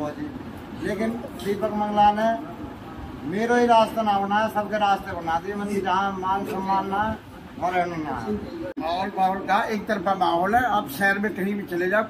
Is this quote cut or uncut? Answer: uncut